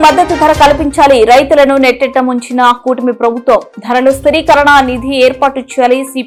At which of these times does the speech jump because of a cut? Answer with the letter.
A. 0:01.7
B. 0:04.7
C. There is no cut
C